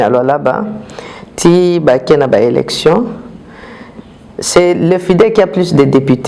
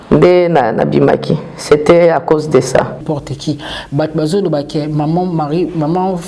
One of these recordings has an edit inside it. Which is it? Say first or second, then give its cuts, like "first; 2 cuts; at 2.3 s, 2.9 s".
second; 1 cut; at 3.1 s